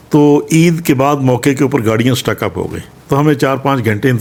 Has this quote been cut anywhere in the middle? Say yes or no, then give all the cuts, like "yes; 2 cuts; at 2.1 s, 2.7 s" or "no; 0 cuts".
no; 0 cuts